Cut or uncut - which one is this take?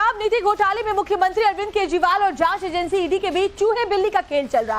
cut